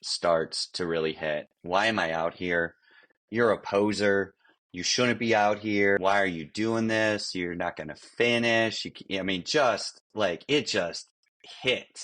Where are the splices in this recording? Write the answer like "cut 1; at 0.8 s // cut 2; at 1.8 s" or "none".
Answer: cut 1; at 6.0 s